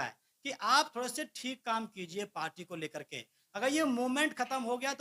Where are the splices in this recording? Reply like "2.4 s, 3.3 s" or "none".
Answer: none